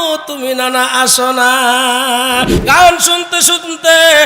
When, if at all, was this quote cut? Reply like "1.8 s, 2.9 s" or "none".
2.6 s